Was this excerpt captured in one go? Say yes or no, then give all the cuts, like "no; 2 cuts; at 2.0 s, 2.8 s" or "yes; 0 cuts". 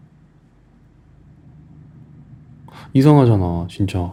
yes; 0 cuts